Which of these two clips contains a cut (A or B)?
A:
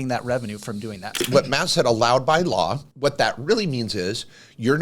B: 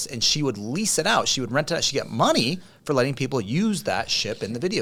A